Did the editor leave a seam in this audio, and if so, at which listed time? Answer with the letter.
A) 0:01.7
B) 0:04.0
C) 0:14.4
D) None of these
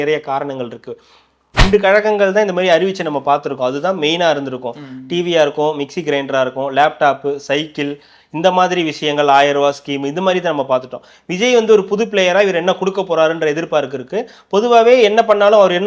A